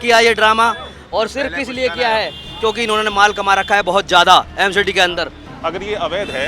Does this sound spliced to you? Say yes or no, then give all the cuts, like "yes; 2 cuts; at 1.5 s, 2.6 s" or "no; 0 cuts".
yes; 1 cut; at 5.4 s